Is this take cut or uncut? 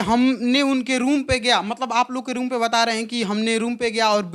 uncut